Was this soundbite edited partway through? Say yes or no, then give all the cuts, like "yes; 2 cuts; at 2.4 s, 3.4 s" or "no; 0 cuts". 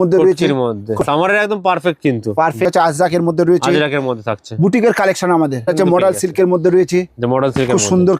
yes; 3 cuts; at 1.0 s, 2.7 s, 5.7 s